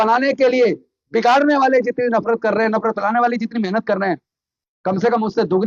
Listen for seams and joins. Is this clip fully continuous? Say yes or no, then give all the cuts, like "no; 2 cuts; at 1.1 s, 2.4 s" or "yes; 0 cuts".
yes; 0 cuts